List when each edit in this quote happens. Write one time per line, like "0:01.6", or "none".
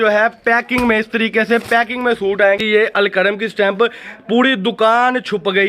0:02.6